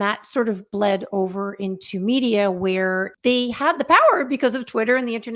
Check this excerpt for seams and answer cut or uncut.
cut